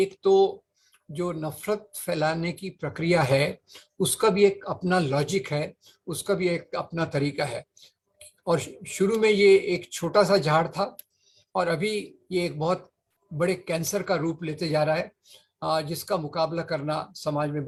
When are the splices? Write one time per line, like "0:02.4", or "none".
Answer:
none